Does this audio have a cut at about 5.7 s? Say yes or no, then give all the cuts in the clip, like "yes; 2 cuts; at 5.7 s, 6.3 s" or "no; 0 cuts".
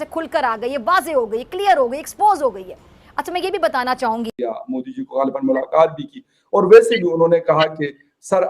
no; 1 cut; at 4.3 s